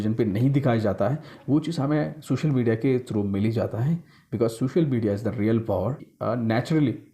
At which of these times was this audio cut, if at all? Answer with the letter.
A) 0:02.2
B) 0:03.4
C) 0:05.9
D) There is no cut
C